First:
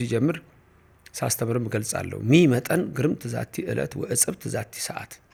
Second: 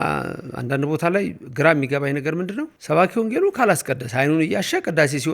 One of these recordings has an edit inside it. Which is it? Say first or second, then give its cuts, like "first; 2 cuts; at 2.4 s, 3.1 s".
second; 1 cut; at 2.7 s